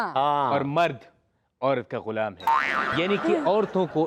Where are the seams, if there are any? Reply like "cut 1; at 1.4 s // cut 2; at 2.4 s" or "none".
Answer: cut 1; at 2.7 s